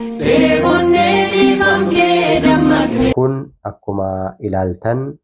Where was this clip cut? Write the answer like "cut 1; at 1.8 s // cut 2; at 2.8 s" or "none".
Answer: cut 1; at 3.1 s